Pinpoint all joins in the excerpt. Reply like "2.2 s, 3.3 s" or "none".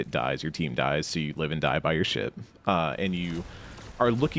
none